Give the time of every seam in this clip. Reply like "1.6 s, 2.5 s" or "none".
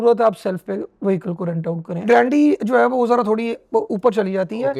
2.0 s